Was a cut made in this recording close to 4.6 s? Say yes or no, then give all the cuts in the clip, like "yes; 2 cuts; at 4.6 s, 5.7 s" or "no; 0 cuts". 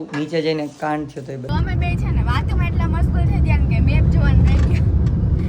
no; 1 cut; at 1.5 s